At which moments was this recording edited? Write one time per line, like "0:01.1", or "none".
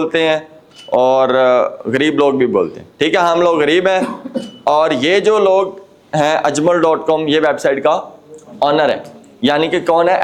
none